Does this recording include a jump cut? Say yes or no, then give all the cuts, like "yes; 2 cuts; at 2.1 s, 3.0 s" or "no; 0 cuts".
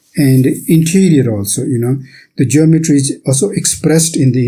no; 0 cuts